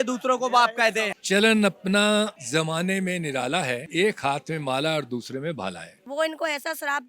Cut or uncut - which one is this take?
cut